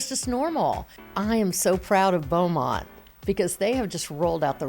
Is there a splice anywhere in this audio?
yes; 1 cut; at 0.9 s

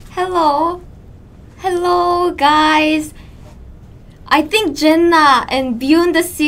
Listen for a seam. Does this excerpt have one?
no; 0 cuts

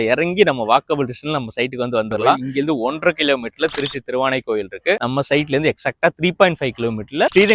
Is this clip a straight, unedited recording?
no; 2 cuts; at 2.4 s, 5.0 s

